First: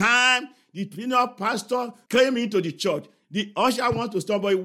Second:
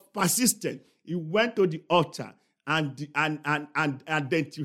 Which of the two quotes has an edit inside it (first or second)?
first